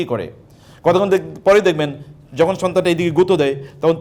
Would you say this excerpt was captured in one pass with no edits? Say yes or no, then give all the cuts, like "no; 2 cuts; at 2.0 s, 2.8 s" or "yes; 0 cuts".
yes; 0 cuts